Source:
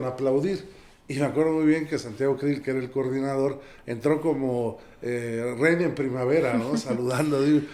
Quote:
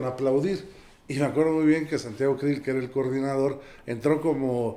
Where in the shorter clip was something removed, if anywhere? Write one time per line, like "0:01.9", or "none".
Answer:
none